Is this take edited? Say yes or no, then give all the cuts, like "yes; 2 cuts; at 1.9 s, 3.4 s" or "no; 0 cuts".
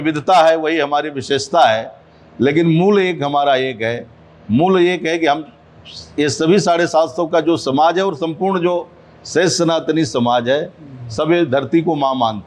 no; 0 cuts